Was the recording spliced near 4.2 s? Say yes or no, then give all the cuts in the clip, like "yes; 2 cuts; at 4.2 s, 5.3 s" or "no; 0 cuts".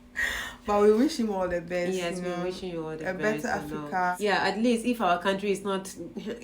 yes; 1 cut; at 4.2 s